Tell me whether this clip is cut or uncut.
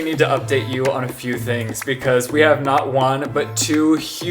uncut